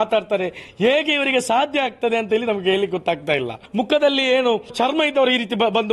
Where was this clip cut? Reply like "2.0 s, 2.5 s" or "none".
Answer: 3.6 s, 4.7 s